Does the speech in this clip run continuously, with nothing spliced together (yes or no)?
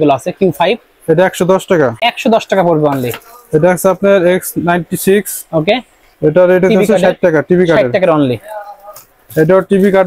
yes